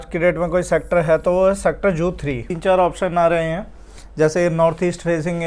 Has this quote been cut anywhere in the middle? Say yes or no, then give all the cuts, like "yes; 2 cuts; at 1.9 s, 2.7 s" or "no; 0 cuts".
yes; 1 cut; at 2.5 s